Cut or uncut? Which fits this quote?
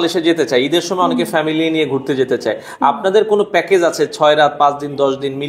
uncut